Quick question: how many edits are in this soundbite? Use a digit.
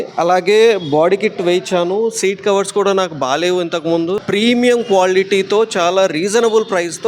1